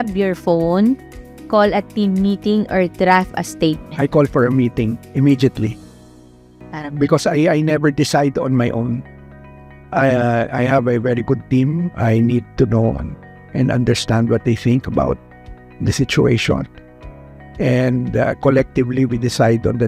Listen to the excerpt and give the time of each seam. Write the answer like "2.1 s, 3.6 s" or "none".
none